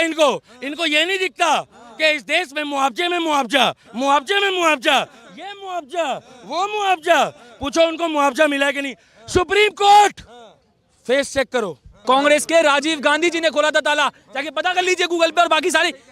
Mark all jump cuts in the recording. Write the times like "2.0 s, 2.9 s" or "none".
11.8 s